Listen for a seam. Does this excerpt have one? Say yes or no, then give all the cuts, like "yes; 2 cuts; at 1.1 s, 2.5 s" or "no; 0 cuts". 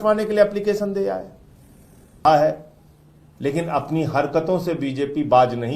yes; 1 cut; at 2.2 s